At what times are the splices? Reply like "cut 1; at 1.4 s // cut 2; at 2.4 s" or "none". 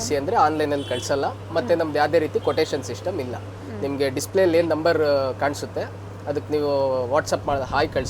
none